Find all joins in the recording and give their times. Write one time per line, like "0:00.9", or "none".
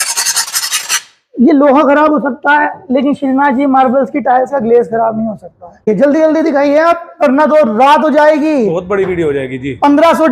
none